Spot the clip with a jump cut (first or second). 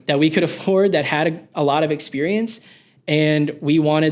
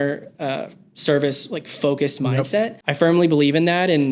second